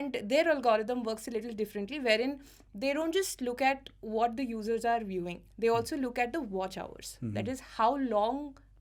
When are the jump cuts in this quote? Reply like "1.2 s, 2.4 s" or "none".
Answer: none